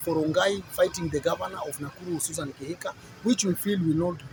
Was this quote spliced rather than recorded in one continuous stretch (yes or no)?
no